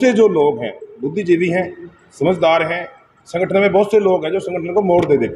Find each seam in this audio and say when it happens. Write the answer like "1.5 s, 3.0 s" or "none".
none